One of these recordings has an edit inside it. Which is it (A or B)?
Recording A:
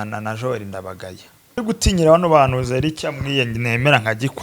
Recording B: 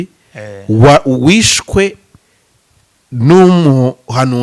A